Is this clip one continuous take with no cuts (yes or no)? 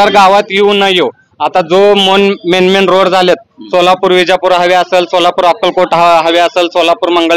yes